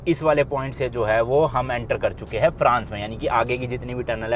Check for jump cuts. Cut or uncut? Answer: uncut